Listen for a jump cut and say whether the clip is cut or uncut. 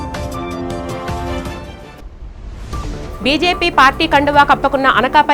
cut